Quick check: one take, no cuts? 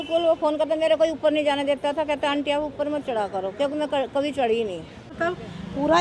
no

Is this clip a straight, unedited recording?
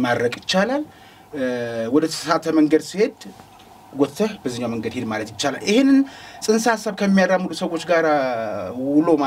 yes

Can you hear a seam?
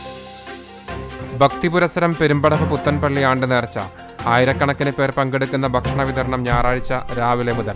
yes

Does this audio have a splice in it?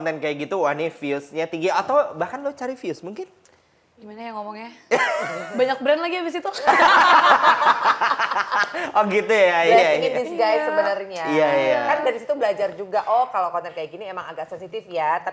no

